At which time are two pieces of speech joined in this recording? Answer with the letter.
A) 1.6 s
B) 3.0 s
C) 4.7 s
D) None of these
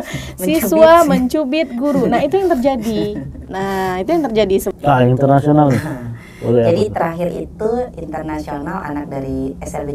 C